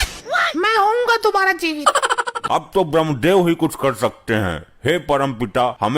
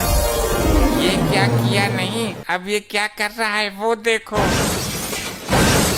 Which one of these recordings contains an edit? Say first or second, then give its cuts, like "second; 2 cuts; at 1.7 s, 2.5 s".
first; 1 cut; at 2.4 s